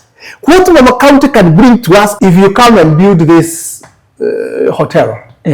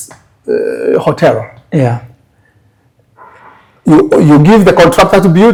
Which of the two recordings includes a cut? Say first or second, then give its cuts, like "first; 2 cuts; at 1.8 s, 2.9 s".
first; 1 cut; at 2.1 s